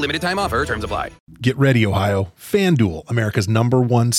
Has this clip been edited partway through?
yes; 1 cut; at 1.2 s

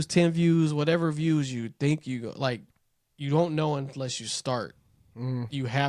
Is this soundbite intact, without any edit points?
yes; 0 cuts

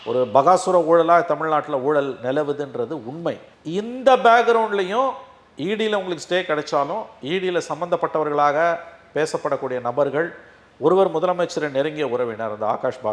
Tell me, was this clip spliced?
no; 0 cuts

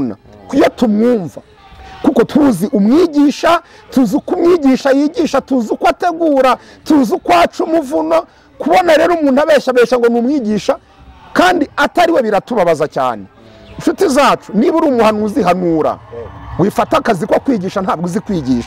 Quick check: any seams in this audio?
no; 0 cuts

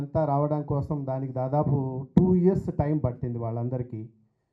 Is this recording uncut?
yes; 0 cuts

